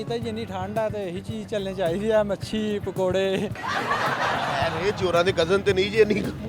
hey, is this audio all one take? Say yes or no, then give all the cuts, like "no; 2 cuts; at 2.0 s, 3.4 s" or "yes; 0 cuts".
no; 1 cut; at 4.5 s